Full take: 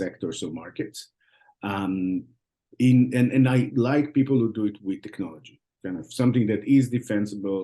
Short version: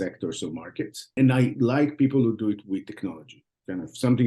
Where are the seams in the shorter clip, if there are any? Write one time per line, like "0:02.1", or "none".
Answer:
0:01.2